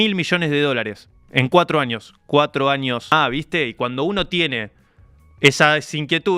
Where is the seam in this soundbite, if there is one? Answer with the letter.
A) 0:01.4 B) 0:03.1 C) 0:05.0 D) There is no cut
B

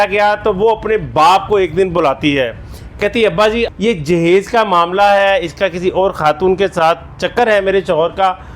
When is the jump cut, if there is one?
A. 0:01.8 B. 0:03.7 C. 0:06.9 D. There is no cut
B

